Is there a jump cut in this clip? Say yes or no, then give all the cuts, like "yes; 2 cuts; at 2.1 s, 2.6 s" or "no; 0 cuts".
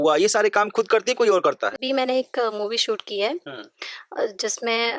yes; 1 cut; at 1.8 s